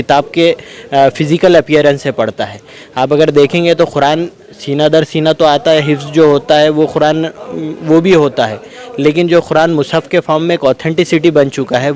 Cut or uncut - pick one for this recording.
uncut